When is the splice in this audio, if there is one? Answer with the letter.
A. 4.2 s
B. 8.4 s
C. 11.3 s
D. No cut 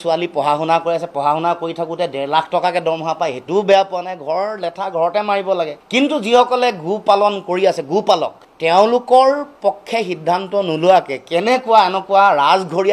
B